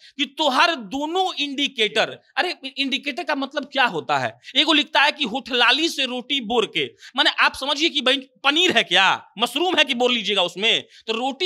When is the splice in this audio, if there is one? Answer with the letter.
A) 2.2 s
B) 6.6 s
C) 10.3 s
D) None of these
D